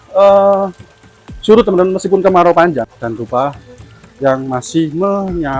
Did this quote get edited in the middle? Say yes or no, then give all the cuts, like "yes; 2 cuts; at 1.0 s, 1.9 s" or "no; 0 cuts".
yes; 1 cut; at 2.9 s